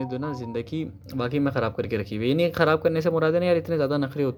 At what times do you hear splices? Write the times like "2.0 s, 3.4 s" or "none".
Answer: none